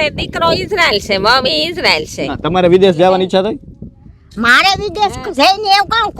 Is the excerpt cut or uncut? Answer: uncut